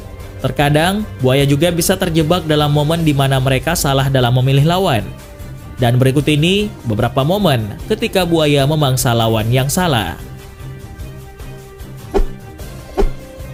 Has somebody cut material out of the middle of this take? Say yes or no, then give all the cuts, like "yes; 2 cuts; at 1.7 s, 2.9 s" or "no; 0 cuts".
no; 0 cuts